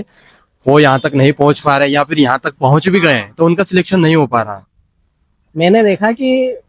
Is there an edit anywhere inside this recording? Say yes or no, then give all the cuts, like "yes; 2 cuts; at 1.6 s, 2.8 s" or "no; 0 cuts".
no; 0 cuts